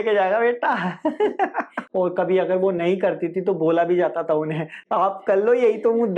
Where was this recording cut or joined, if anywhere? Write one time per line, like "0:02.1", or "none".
0:01.8
0:04.8